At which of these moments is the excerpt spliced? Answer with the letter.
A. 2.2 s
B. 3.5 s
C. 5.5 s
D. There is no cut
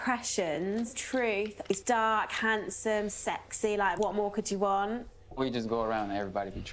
C